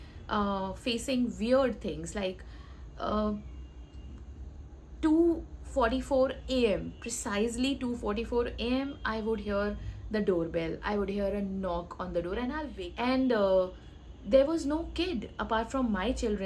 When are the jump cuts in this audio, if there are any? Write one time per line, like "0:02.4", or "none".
none